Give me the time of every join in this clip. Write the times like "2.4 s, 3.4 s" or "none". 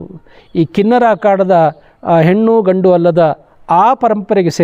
none